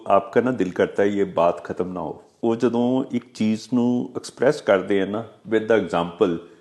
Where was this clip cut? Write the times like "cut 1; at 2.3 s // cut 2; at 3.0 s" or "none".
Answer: cut 1; at 2.2 s

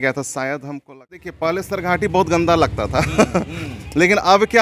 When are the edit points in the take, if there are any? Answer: cut 1; at 1.4 s

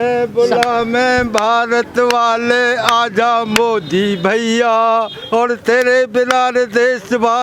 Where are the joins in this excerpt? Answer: none

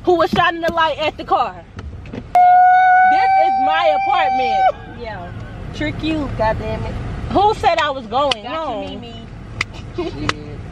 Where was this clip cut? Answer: none

